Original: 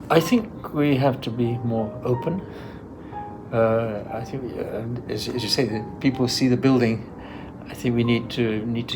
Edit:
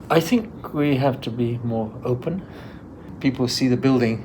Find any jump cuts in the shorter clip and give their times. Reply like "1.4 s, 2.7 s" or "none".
3.1 s